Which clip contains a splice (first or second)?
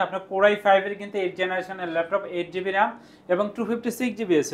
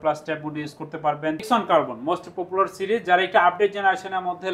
second